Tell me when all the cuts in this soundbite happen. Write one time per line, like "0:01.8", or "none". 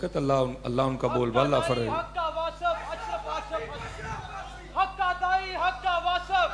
none